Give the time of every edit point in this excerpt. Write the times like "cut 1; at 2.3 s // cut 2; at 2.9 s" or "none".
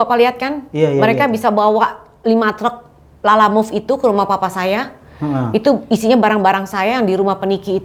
none